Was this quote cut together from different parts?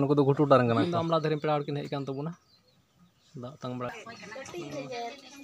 yes; 2 cuts; at 0.9 s, 3.9 s

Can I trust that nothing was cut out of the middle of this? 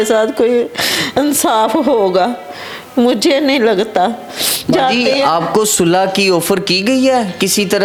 yes; 0 cuts

